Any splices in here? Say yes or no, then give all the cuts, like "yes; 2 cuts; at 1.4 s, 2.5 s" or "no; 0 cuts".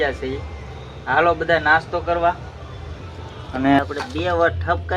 yes; 1 cut; at 3.8 s